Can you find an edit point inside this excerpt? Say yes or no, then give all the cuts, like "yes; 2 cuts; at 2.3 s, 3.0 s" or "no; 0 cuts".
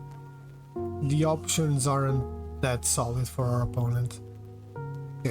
yes; 1 cut; at 1.0 s